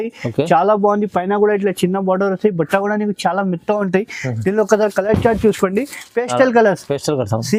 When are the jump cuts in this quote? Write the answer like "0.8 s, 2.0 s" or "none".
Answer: none

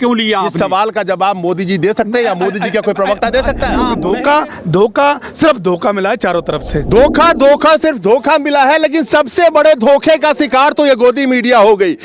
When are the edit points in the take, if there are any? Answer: 3.9 s

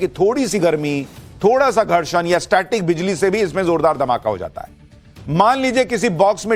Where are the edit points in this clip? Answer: none

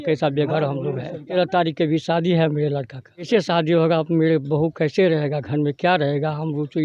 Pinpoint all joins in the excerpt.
1.2 s, 3.3 s

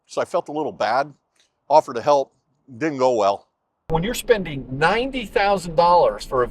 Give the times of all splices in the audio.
3.9 s

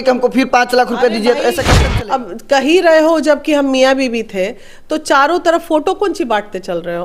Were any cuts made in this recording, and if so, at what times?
1.7 s

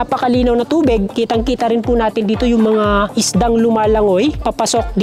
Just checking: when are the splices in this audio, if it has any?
none

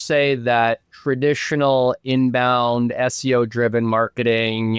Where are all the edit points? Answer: none

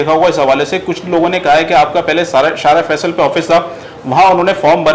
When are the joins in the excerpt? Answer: none

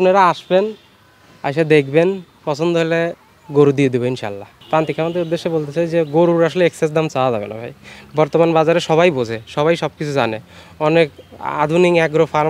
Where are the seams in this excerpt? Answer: 4.5 s

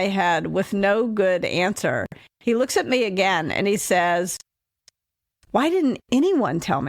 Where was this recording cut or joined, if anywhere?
none

